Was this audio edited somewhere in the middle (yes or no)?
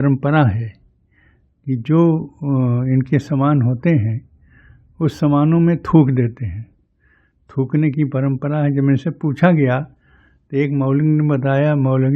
no